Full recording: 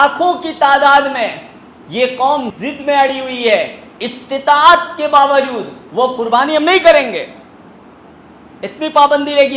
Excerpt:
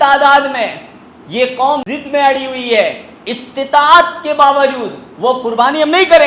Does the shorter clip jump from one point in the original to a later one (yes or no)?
yes